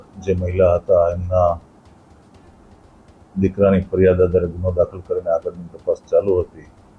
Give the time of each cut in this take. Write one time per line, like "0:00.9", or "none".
none